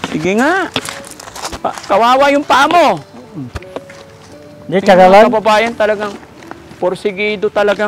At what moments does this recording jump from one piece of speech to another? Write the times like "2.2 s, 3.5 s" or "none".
none